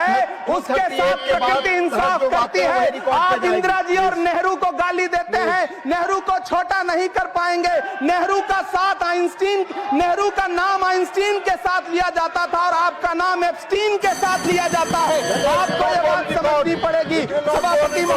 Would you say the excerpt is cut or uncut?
uncut